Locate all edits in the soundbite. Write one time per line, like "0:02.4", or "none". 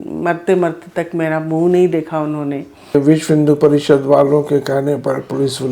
0:02.9